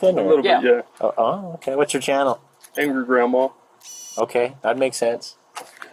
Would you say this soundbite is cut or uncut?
uncut